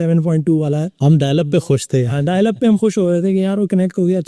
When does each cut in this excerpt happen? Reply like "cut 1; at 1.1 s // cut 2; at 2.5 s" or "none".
none